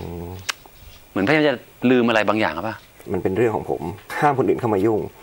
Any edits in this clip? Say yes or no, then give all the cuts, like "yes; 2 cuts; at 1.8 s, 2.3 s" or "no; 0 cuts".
yes; 2 cuts; at 3.1 s, 4.1 s